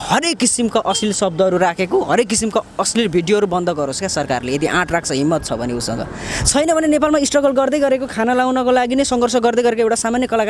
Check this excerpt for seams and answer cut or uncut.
uncut